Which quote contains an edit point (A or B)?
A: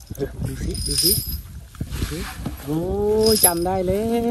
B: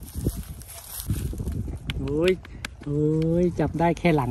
B